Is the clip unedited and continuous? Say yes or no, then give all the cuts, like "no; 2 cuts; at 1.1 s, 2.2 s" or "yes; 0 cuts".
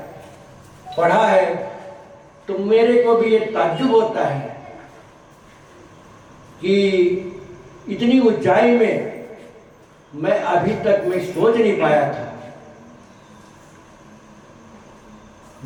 yes; 0 cuts